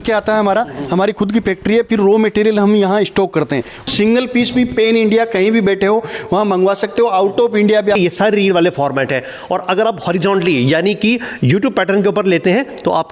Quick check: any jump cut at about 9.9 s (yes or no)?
no